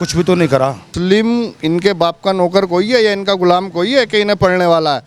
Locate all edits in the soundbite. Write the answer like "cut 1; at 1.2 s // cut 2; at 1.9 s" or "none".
cut 1; at 1.0 s